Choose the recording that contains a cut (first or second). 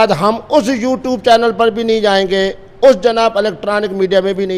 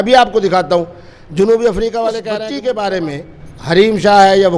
second